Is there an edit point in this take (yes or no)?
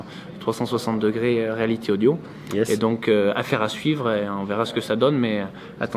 no